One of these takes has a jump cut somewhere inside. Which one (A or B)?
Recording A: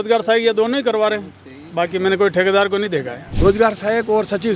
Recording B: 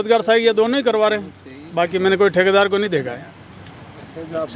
A